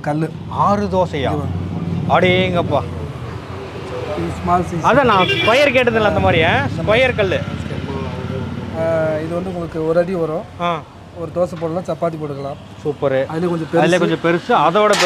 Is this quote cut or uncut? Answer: uncut